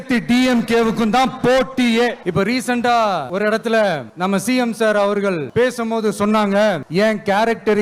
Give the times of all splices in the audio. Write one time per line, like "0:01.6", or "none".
0:02.2
0:03.3
0:04.1
0:05.4
0:06.8